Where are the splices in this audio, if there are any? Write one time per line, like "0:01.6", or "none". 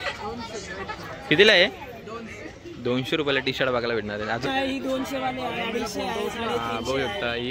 0:04.4